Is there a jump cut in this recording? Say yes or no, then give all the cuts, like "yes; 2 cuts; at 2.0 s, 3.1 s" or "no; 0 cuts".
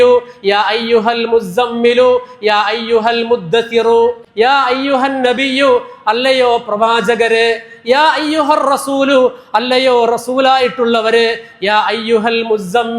yes; 1 cut; at 4.2 s